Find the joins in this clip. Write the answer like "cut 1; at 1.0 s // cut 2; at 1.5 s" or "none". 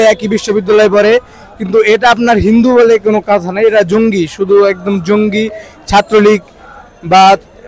none